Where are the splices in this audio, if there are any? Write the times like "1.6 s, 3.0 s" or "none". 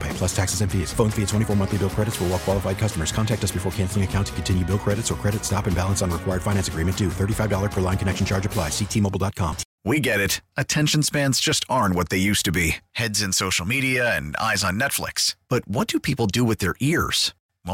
9.7 s